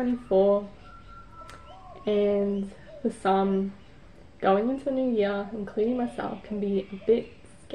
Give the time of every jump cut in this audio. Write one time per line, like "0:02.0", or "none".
none